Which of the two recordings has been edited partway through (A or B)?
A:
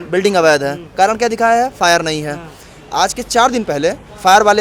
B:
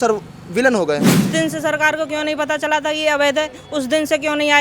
B